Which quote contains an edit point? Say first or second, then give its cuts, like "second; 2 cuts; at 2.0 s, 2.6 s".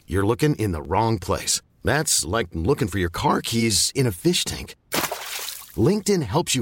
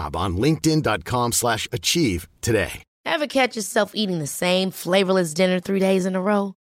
second; 1 cut; at 2.9 s